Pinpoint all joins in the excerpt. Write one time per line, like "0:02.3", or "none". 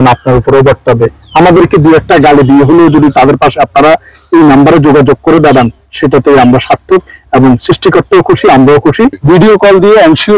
0:09.2